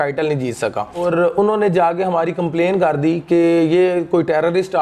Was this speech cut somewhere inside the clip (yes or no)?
yes